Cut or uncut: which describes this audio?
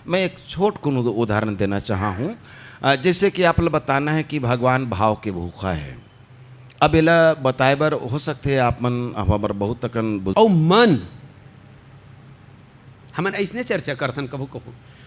cut